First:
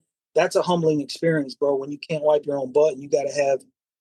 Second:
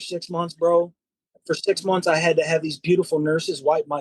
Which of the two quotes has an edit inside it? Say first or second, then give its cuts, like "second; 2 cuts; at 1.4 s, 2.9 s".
second; 1 cut; at 1.3 s